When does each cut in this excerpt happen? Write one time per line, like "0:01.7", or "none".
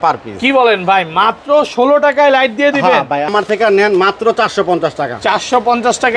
0:03.3